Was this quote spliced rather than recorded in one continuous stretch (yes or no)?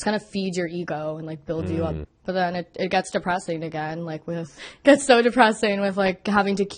yes